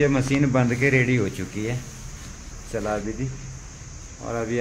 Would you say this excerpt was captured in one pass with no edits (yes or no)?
yes